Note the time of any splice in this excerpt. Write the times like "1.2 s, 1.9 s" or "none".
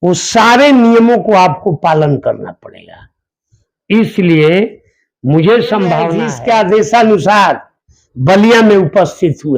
6.2 s